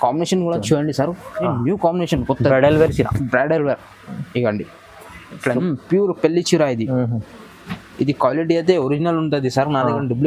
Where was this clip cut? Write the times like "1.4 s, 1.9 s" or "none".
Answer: 5.6 s